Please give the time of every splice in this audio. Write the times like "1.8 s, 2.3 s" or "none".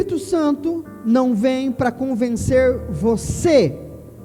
none

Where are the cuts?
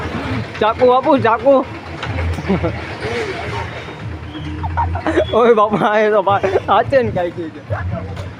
none

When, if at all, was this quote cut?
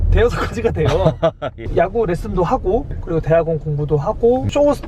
1.7 s

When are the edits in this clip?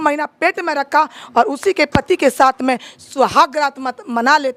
none

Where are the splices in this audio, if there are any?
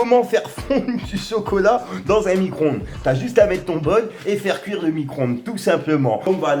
none

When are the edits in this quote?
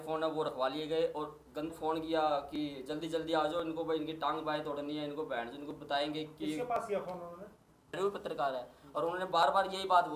1.7 s, 7.9 s

